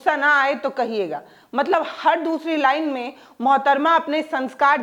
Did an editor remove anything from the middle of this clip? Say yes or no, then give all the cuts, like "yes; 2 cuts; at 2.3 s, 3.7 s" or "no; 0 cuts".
no; 0 cuts